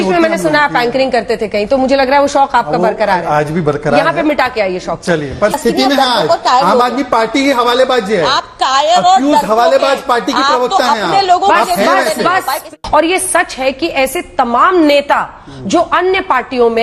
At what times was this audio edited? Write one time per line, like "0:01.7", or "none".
0:05.6
0:12.6

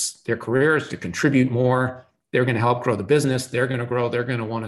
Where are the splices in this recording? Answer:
none

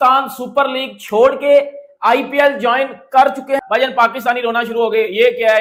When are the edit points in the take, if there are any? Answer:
none

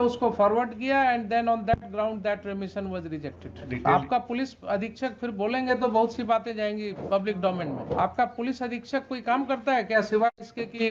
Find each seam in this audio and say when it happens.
0:03.6
0:07.0
0:08.0

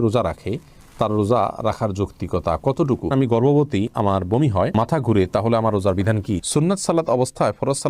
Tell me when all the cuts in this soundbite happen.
0:03.1
0:06.4

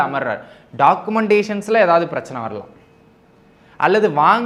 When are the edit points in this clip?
none

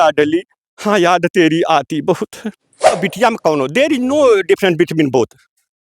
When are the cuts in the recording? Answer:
0:03.0

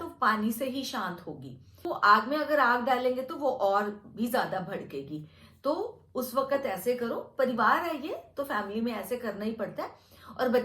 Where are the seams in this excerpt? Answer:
0:01.8

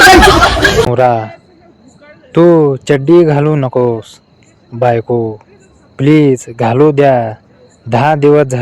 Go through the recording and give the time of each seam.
0:00.9

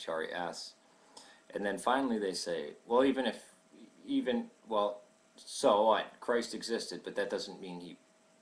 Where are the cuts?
0:06.2

